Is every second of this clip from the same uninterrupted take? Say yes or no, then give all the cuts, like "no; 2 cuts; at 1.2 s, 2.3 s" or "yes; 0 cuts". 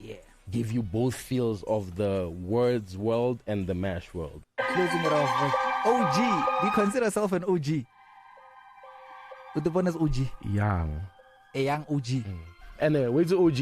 no; 1 cut; at 4.3 s